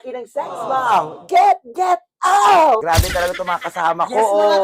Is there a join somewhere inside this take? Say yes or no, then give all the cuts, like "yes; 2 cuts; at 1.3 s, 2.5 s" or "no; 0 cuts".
yes; 1 cut; at 2.8 s